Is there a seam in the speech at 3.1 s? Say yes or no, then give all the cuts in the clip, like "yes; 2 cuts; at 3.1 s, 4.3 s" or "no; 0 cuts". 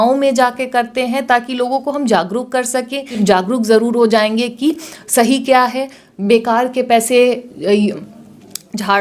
yes; 1 cut; at 3.1 s